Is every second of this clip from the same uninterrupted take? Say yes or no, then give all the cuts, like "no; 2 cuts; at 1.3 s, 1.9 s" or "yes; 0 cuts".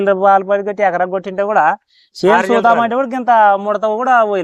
yes; 0 cuts